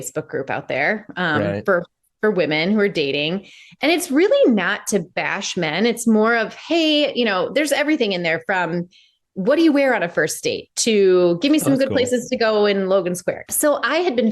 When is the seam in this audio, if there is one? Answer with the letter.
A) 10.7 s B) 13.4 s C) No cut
B